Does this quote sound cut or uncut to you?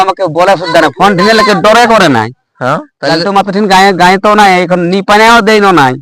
cut